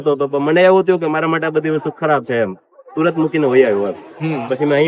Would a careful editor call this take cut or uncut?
uncut